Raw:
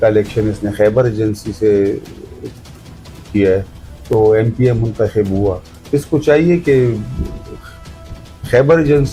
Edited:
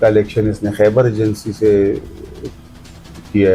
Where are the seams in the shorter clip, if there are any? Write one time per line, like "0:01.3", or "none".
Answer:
none